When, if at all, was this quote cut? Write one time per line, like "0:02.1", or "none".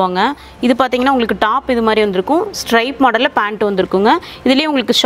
none